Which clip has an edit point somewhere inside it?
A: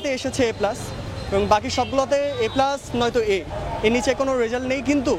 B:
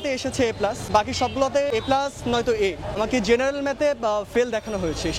B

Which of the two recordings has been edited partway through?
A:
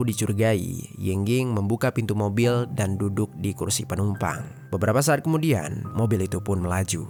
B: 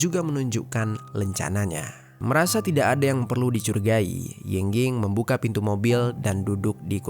B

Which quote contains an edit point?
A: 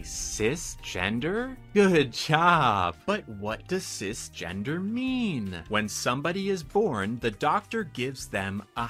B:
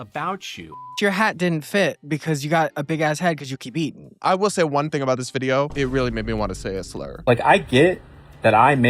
B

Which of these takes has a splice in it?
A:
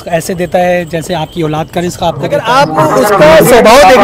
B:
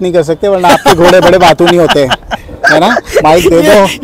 A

